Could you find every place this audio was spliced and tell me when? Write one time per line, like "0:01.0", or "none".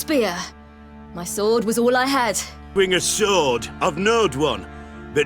0:02.6